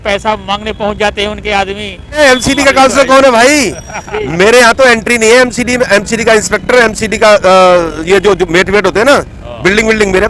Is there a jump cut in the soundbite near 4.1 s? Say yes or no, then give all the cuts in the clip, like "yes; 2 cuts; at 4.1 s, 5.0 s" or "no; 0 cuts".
no; 1 cut; at 2.2 s